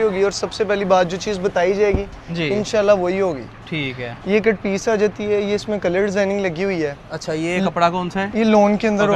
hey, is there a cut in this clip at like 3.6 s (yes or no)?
no